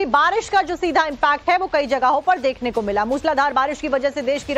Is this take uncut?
yes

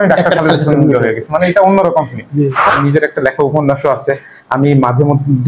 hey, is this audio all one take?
no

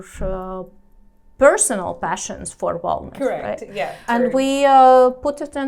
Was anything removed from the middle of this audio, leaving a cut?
yes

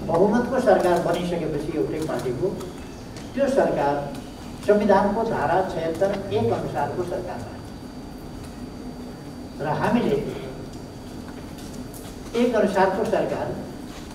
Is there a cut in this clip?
no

